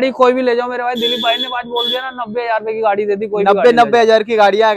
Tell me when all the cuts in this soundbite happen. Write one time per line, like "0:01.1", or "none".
none